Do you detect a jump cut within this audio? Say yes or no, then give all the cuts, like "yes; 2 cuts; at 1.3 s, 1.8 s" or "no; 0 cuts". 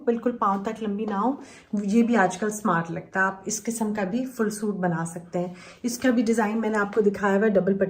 no; 0 cuts